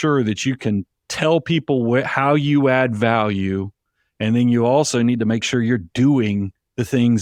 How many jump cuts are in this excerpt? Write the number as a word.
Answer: zero